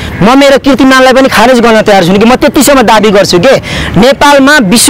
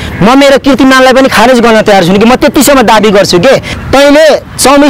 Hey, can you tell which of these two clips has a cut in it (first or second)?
second